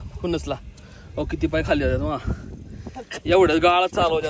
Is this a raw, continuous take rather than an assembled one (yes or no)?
yes